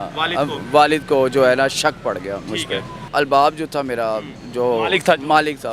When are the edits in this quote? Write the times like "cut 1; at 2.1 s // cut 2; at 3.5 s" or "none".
cut 1; at 3.0 s